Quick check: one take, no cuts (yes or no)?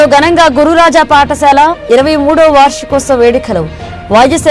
yes